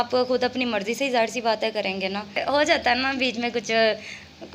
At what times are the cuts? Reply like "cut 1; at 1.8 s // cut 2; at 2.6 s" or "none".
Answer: cut 1; at 2.4 s